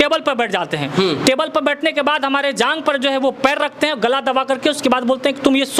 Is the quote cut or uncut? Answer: uncut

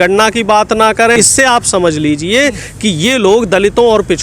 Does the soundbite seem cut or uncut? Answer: cut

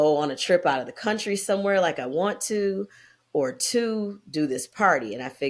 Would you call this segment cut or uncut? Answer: uncut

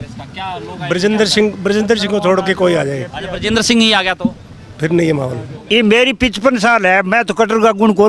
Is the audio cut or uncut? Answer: cut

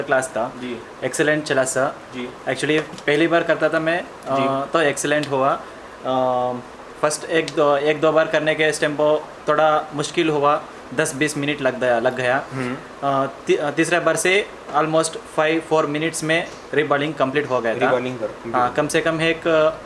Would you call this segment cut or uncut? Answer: uncut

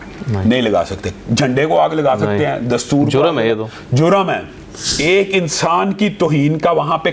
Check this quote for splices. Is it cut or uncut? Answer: cut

